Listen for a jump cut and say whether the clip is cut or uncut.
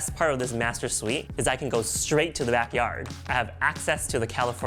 cut